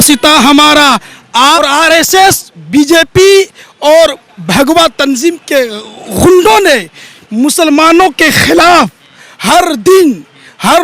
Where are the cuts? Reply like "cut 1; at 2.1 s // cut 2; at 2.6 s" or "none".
cut 1; at 1.6 s